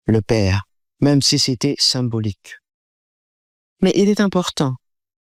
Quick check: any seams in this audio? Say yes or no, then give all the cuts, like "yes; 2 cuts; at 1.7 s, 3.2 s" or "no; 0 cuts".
no; 0 cuts